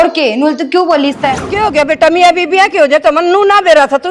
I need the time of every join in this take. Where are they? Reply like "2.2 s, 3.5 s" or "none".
1.5 s